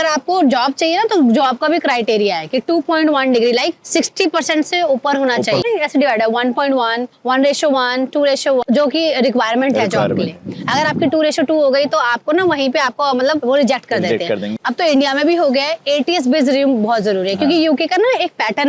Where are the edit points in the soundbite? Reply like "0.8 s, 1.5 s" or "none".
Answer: 5.6 s, 8.6 s, 14.5 s